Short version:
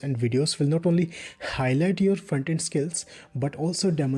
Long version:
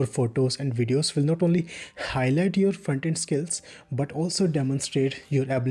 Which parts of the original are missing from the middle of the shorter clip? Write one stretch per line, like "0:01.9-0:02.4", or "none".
none